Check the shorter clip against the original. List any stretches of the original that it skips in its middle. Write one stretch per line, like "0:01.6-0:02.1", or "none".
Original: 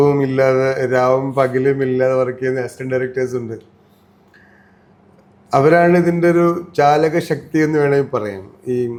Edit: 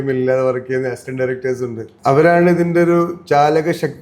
0:03.6-0:05.3